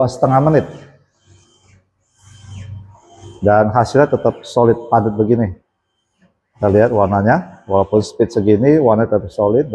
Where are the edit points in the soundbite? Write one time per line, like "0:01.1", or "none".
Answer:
none